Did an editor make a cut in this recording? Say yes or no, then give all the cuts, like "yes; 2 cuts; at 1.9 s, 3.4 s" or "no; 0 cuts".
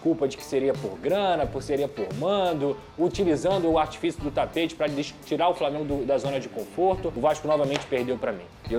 yes; 1 cut; at 7.1 s